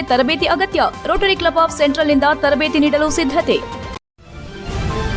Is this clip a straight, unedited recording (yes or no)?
no